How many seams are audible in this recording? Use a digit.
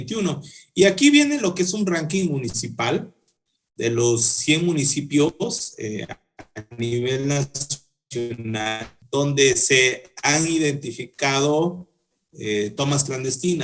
1